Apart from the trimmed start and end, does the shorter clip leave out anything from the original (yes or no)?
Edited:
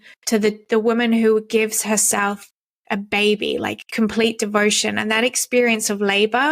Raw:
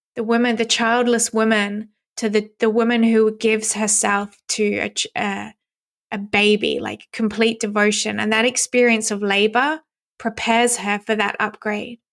yes